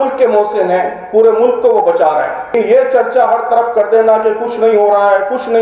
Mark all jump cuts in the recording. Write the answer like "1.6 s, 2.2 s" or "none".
2.5 s